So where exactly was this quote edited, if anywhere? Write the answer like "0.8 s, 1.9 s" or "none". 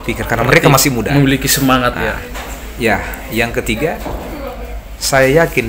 none